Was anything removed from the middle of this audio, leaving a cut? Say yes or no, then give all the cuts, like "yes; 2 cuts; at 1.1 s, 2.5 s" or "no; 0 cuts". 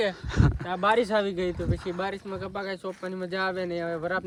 no; 0 cuts